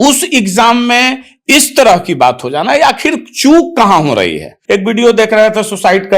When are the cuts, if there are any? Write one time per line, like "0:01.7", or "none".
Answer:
0:04.5